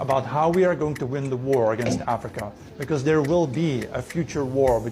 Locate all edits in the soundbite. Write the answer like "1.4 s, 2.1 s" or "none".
2.6 s